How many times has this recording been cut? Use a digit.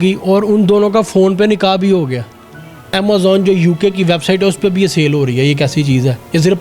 1